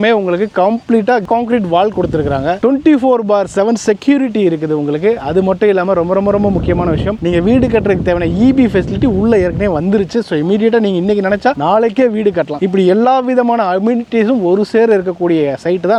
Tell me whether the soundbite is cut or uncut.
uncut